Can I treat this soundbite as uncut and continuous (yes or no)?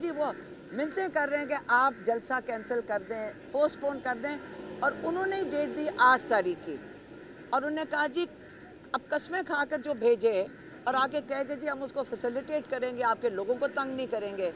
yes